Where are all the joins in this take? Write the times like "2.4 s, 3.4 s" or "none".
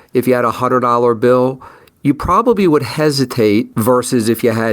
3.7 s